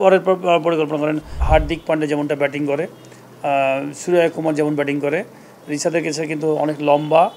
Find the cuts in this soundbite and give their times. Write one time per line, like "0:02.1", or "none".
0:01.3